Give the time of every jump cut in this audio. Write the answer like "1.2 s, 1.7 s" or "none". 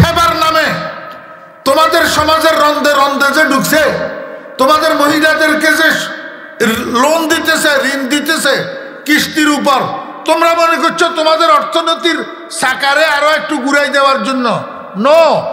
none